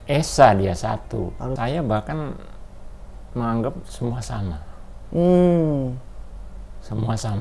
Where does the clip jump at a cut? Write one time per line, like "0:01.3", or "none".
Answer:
0:01.5

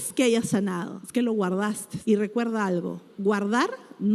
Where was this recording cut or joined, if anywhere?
0:01.0
0:01.9

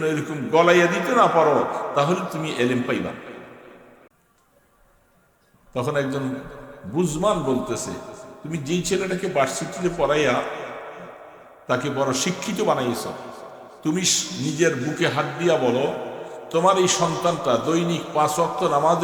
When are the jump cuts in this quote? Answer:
0:04.1

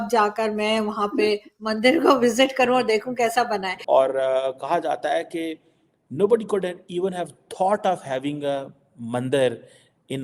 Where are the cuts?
0:03.8

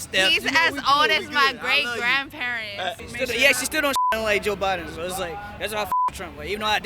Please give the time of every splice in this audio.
0:03.0

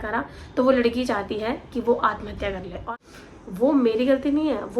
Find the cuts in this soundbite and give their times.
0:02.9

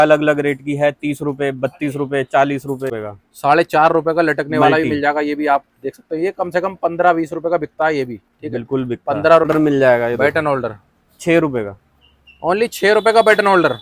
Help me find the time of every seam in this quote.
0:02.9
0:09.5

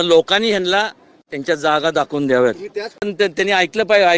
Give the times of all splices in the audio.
none

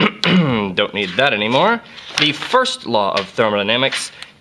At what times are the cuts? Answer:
0:01.1

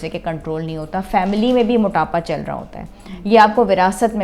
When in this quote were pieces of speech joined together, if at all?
none

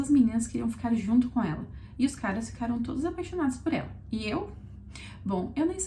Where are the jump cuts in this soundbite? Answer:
none

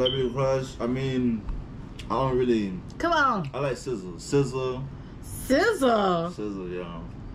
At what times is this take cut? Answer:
none

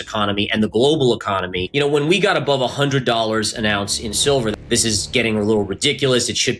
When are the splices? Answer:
0:01.6
0:04.5

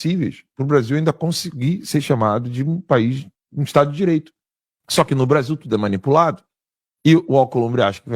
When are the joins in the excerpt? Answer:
0:04.8

